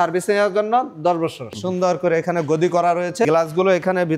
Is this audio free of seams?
no; 2 cuts; at 1.6 s, 3.2 s

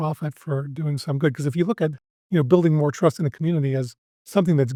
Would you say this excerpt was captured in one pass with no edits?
yes; 0 cuts

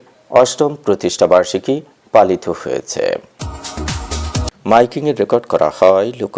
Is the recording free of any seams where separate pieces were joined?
no; 1 cut; at 3.3 s

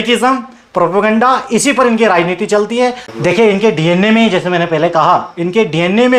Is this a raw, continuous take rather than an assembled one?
no; 1 cut; at 3.1 s

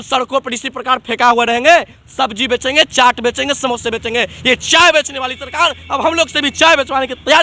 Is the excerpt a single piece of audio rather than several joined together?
yes; 0 cuts

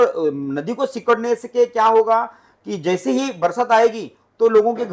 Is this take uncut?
yes; 0 cuts

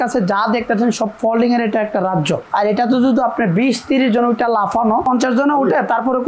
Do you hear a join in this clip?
yes; 2 cuts; at 2.4 s, 5.0 s

